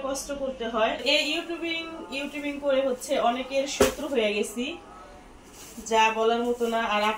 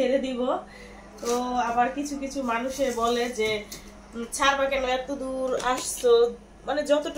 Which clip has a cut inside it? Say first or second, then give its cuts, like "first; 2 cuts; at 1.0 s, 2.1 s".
first; 1 cut; at 1.0 s